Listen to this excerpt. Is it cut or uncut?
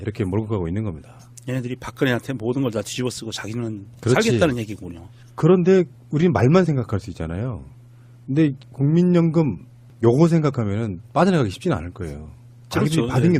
cut